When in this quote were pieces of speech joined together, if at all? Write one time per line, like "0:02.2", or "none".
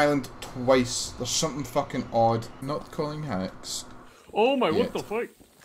0:02.5